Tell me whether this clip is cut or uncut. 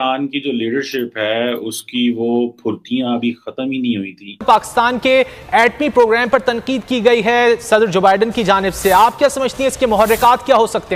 cut